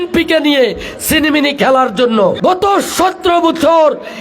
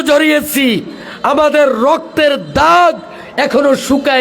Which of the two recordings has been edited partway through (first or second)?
first